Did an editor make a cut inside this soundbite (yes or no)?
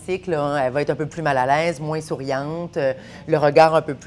no